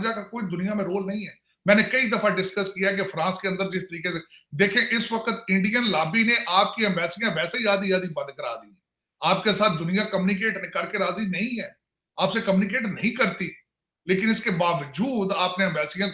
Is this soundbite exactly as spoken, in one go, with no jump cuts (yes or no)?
yes